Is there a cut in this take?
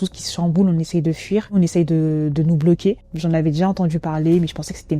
yes; 2 cuts; at 1.6 s, 3.1 s

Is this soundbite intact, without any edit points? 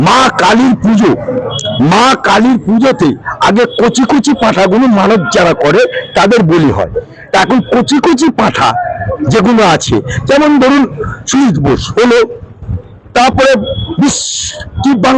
yes; 0 cuts

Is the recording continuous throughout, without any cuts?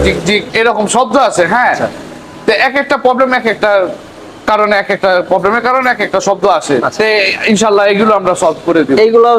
yes; 0 cuts

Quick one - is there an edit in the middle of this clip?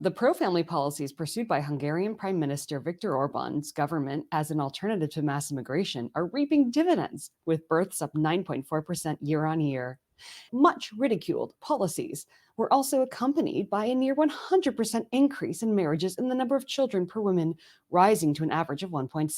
yes; 2 cuts; at 10.5 s, 11.5 s

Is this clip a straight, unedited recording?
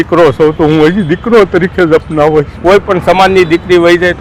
no; 1 cut; at 2.5 s

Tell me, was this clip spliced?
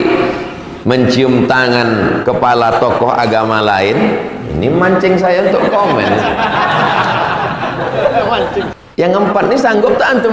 yes; 1 cut; at 8.7 s

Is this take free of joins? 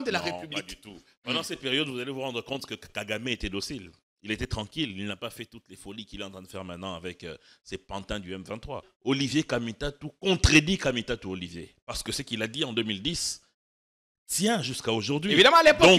no; 1 cut; at 8.9 s

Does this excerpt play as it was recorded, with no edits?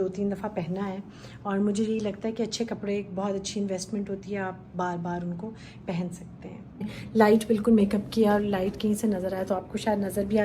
no; 1 cut; at 6.9 s

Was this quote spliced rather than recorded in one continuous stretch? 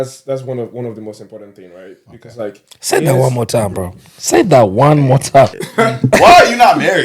yes; 1 cut; at 5.6 s

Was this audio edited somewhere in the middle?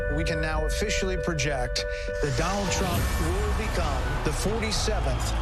no; 0 cuts

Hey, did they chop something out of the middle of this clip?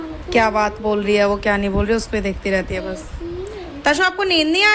no; 0 cuts

